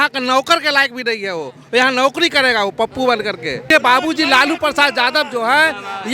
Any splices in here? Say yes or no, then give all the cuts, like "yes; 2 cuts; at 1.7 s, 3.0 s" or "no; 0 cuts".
yes; 1 cut; at 3.6 s